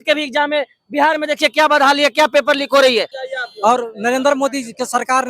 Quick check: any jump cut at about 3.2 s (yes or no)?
yes